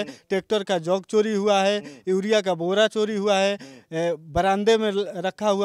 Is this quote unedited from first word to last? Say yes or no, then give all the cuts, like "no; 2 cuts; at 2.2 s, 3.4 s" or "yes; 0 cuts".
yes; 0 cuts